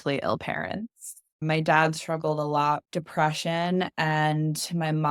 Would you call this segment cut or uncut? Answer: cut